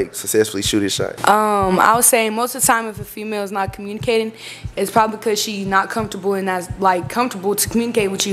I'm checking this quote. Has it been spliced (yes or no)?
yes